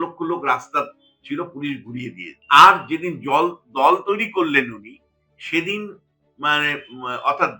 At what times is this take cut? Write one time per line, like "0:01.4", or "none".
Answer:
0:02.3